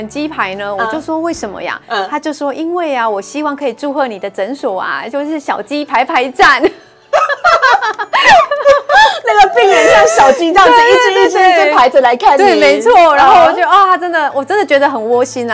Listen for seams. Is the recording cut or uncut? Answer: uncut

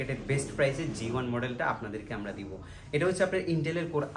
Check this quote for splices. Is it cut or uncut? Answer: uncut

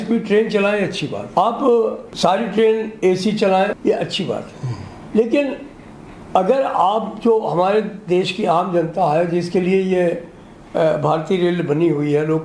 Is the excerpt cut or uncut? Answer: cut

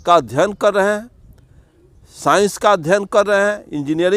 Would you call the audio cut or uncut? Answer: uncut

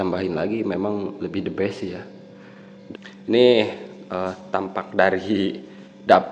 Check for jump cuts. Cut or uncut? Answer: cut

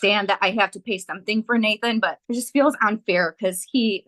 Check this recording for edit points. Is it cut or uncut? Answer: cut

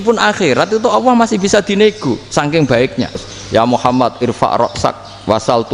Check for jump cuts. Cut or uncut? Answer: cut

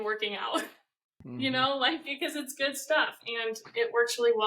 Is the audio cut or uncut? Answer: uncut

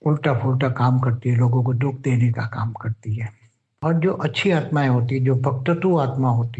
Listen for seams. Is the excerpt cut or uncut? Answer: cut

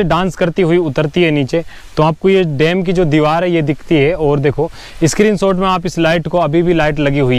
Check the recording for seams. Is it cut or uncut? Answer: uncut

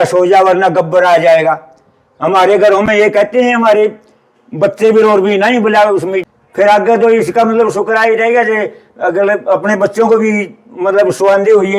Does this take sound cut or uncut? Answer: uncut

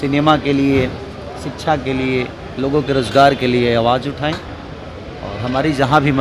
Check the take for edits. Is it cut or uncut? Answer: uncut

